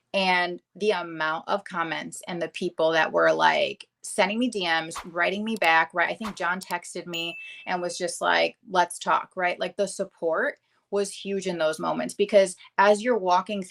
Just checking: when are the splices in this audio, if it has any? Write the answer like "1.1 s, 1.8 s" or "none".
none